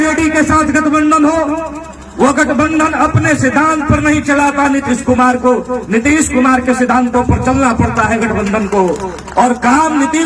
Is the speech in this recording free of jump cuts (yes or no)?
yes